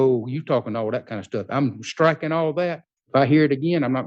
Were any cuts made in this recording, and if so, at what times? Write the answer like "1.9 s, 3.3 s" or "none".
2.9 s